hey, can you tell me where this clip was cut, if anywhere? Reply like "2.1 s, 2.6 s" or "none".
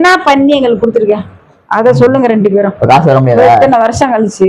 none